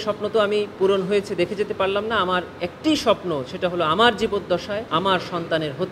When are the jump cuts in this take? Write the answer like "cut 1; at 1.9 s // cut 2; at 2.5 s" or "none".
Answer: cut 1; at 4.8 s